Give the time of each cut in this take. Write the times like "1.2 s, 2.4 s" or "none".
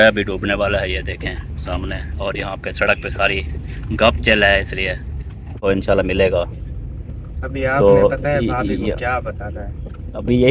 5.7 s